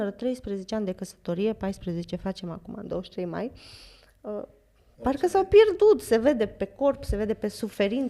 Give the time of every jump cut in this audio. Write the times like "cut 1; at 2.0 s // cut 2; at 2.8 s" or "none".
none